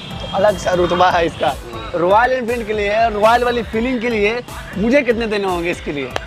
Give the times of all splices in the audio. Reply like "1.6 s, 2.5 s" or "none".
1.6 s